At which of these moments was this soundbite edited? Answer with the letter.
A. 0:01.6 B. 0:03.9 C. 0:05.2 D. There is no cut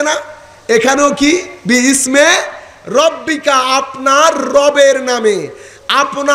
D